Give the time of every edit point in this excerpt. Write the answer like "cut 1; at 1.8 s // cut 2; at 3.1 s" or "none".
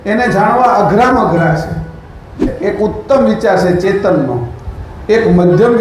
cut 1; at 2.5 s